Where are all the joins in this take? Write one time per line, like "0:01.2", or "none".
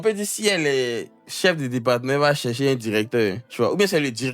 0:03.4